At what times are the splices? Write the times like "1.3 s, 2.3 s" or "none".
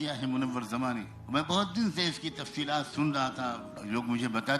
1.1 s, 3.7 s